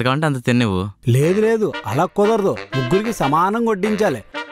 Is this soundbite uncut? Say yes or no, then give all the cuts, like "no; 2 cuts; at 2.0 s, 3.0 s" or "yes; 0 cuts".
yes; 0 cuts